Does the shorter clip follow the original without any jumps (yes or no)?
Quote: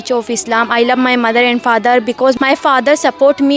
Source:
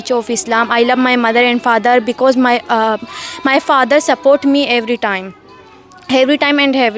no